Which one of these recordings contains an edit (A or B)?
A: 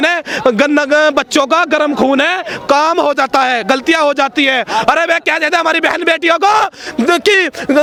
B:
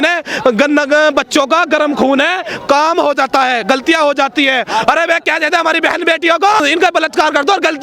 B